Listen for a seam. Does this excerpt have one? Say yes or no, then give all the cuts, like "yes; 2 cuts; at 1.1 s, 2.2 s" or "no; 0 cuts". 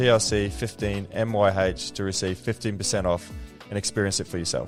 no; 0 cuts